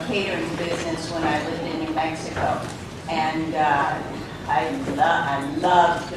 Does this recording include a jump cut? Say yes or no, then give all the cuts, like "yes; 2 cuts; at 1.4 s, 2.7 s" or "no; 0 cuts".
no; 0 cuts